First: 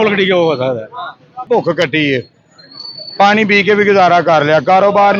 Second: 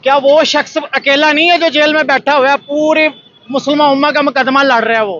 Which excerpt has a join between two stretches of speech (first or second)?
first